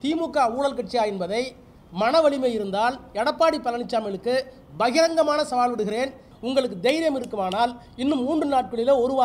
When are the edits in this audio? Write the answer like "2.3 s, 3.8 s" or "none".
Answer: 6.3 s